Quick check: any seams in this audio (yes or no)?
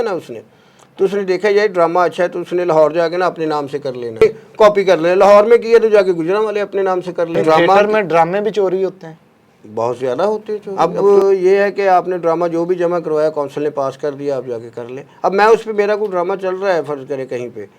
yes